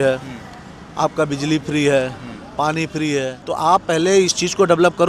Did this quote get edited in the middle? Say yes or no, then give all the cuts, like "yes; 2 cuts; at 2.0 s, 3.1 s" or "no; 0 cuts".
yes; 1 cut; at 3.4 s